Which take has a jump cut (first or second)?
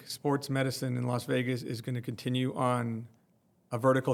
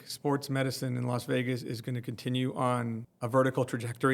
second